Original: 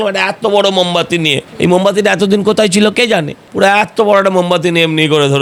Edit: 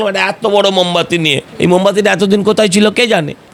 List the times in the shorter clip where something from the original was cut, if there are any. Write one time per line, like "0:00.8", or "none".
none